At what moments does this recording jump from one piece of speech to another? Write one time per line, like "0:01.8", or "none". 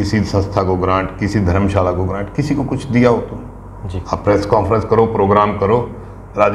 none